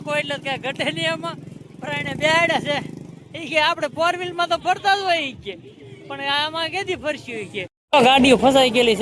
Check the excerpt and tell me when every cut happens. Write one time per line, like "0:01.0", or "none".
0:07.8